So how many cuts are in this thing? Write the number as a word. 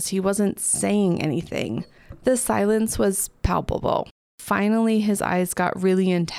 one